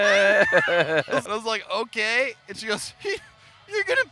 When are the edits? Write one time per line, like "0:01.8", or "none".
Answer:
0:01.3